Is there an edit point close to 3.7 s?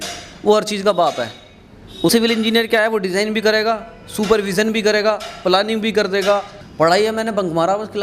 no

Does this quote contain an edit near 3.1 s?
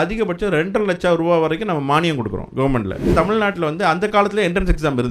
yes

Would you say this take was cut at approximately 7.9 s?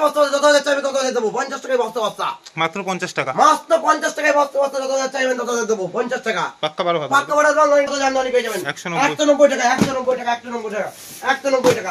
yes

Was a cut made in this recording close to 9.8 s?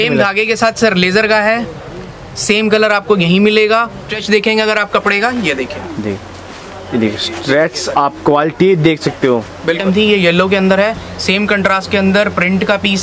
yes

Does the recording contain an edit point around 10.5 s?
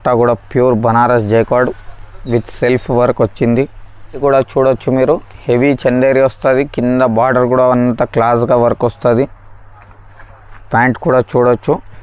no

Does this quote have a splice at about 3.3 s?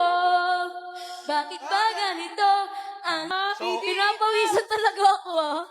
yes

